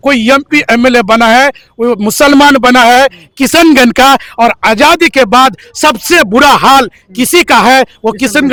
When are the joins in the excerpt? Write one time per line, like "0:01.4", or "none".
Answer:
none